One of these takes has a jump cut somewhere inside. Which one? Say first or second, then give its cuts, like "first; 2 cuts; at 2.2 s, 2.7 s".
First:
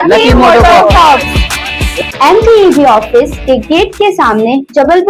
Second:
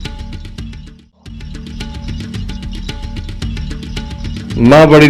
second; 2 cuts; at 1.5 s, 4.2 s